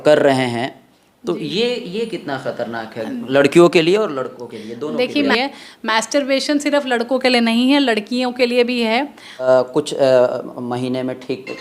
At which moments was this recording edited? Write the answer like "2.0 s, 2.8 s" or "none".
5.3 s, 9.4 s